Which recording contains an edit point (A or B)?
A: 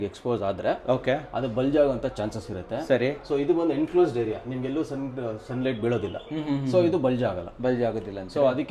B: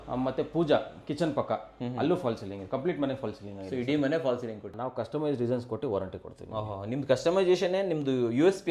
B